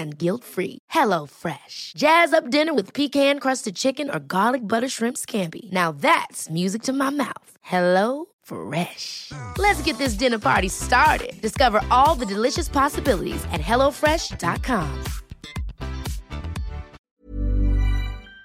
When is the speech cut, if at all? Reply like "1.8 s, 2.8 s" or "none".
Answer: 16.9 s

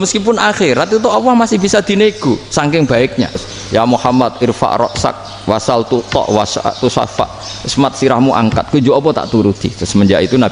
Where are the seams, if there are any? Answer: 3.5 s

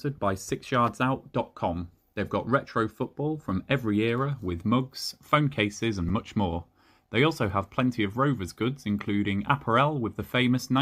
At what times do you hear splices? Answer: none

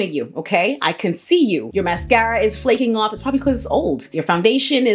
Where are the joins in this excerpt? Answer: 1.7 s

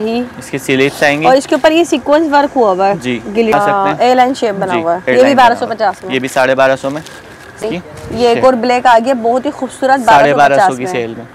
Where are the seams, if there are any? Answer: 3.5 s, 7.6 s

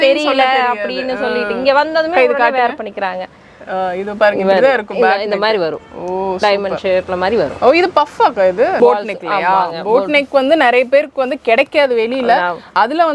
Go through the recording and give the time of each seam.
8.8 s

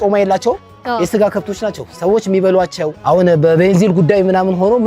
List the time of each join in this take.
3.0 s

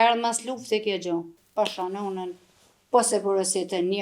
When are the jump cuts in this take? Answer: 1.4 s

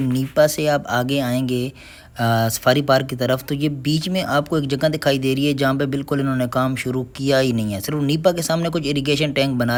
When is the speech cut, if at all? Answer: none

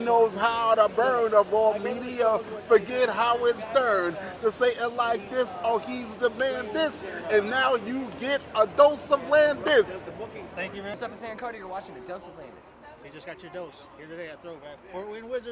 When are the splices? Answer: 10.9 s

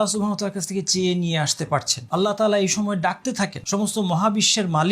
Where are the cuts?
2.0 s, 3.6 s

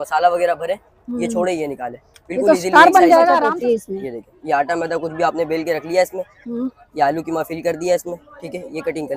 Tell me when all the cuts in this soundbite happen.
3.5 s

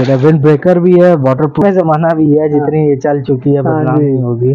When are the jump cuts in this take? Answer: 1.6 s

